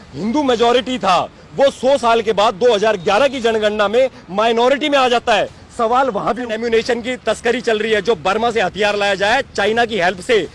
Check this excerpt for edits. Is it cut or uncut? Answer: cut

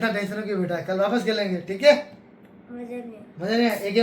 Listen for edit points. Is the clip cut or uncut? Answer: uncut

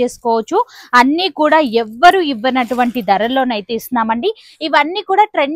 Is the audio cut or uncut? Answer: uncut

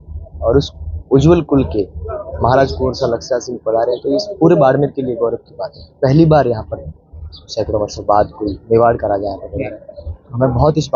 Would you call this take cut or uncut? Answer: uncut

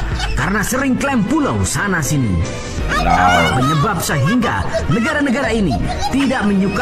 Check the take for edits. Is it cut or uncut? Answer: uncut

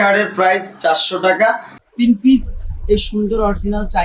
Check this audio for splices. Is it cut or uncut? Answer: cut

